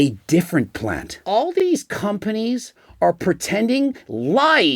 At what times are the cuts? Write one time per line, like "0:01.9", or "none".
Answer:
0:01.5